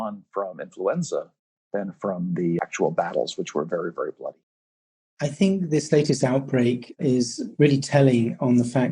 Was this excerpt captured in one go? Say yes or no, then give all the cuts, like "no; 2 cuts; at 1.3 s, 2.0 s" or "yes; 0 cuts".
no; 2 cuts; at 2.6 s, 4.5 s